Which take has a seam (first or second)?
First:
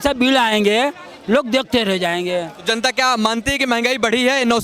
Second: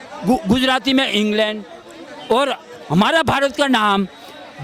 first